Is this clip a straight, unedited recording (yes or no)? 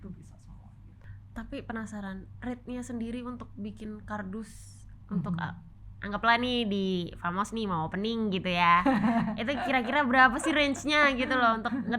no